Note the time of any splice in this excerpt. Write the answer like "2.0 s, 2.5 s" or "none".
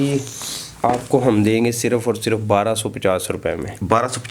none